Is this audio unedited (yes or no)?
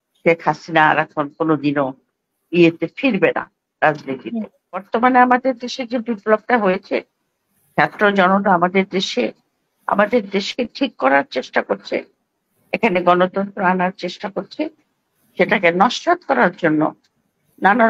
no